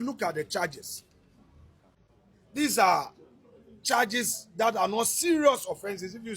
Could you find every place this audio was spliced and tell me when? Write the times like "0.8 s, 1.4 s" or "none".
2.0 s